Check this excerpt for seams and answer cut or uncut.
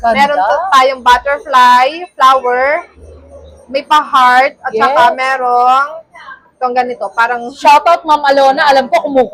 uncut